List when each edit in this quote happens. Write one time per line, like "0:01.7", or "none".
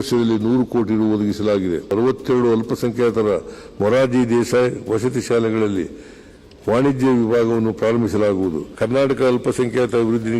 0:01.9
0:08.7